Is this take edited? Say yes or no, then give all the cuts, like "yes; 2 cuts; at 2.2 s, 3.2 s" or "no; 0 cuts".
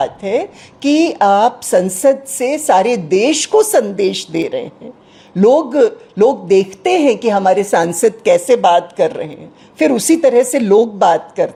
no; 0 cuts